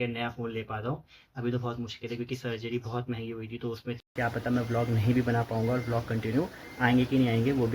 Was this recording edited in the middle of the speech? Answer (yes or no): yes